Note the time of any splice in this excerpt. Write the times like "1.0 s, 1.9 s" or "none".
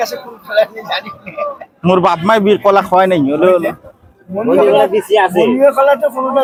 none